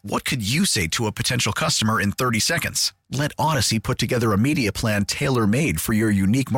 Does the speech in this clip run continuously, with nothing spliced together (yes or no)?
yes